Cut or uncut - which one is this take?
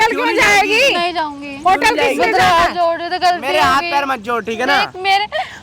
uncut